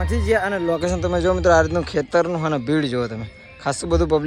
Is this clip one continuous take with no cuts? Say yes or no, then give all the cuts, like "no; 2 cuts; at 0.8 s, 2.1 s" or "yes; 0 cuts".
yes; 0 cuts